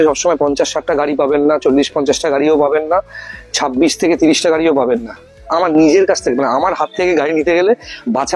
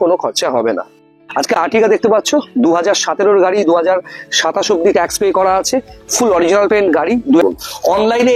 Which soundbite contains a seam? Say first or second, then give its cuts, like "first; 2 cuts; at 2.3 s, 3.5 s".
second; 2 cuts; at 0.9 s, 7.4 s